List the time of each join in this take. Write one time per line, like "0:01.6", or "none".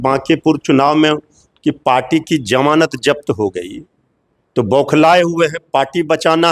none

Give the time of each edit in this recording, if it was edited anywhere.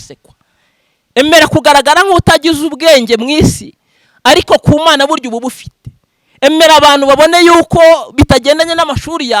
none

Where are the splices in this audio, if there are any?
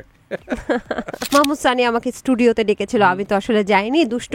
0:01.2

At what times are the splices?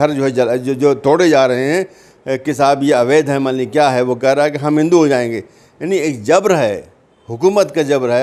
none

